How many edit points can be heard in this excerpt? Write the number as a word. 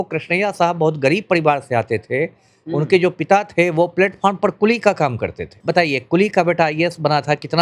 one